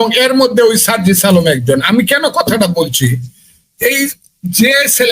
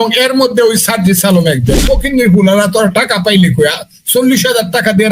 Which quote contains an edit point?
second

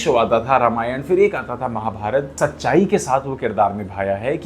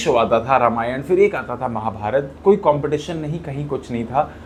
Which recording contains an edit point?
first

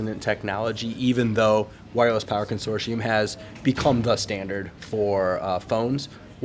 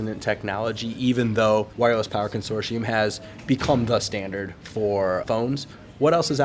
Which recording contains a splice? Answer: second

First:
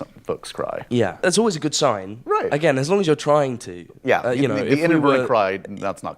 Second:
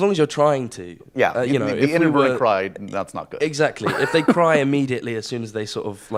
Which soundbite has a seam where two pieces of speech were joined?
first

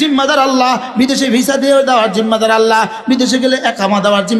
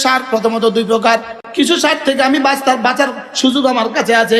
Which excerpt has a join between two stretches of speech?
second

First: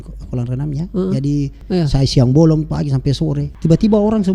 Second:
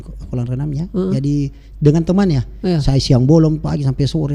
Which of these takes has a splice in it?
first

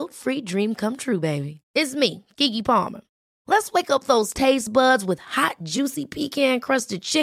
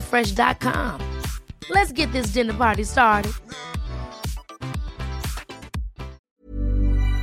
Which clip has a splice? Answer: second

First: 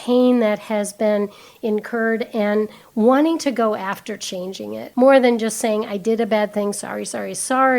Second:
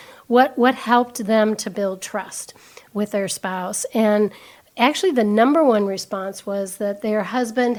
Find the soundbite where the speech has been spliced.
first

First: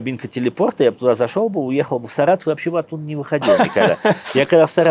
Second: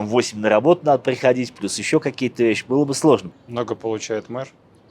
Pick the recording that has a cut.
second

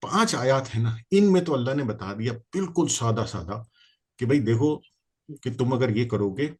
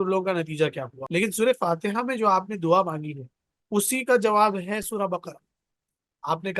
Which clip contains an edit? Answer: second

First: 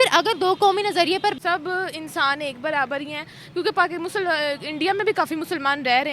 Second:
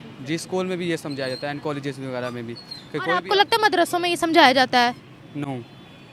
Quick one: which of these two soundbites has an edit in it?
first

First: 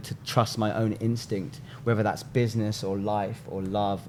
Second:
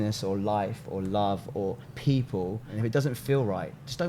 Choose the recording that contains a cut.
second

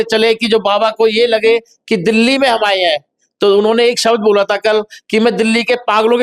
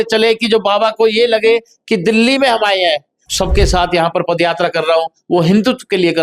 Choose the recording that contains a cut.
second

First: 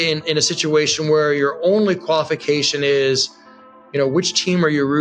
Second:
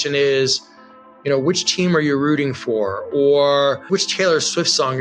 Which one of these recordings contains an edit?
second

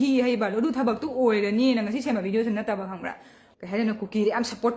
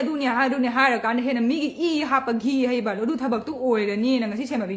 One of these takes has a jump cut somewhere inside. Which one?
first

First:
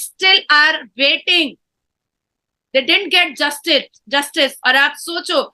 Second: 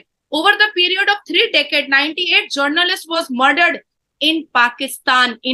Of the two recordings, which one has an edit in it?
first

